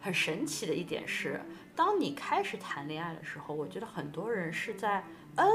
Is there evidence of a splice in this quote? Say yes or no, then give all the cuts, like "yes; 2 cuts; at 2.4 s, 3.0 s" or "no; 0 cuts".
no; 0 cuts